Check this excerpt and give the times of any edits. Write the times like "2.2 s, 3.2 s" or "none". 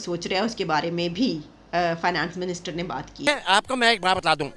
3.3 s